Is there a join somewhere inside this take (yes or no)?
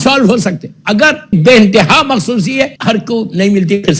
yes